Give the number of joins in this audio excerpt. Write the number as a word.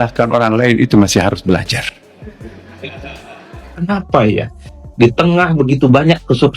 one